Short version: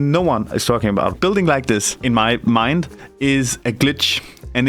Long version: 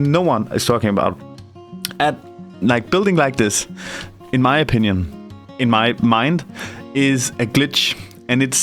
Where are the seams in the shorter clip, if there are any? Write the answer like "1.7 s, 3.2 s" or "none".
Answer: 1.2 s, 1.9 s, 3.0 s